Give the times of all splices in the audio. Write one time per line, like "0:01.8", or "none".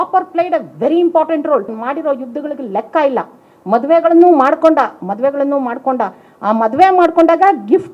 0:01.8